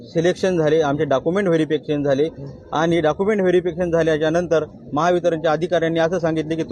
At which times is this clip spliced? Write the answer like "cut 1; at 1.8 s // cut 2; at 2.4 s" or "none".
none

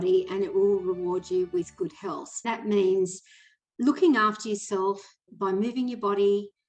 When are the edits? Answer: cut 1; at 2.5 s // cut 2; at 5.3 s

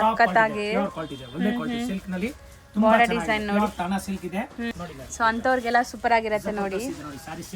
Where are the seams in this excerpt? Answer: cut 1; at 4.7 s

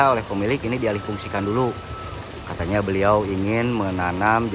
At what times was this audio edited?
none

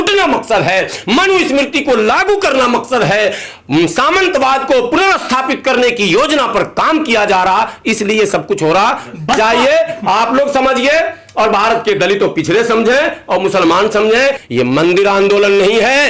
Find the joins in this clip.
cut 1; at 14.4 s

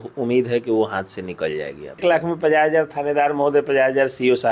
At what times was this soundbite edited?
cut 1; at 2.0 s

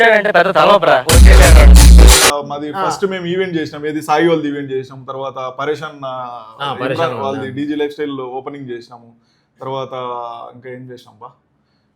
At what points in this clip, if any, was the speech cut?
cut 1; at 2.3 s

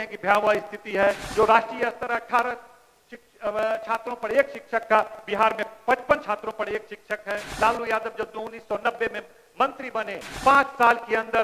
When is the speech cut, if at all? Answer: cut 1; at 1.2 s // cut 2; at 7.5 s

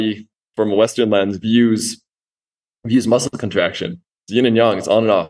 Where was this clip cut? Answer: cut 1; at 3.4 s

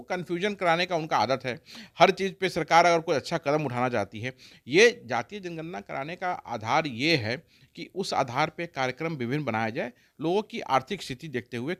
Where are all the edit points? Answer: none

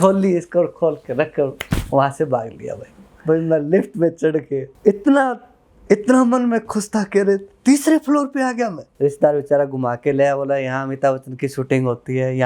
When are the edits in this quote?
cut 1; at 3.2 s // cut 2; at 8.9 s

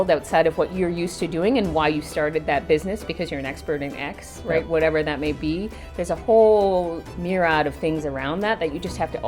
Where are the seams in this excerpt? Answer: cut 1; at 7.1 s

